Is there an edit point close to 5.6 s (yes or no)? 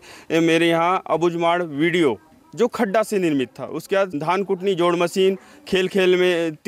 no